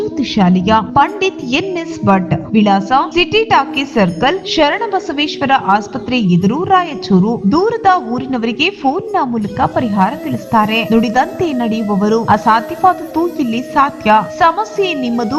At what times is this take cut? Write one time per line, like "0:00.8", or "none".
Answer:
none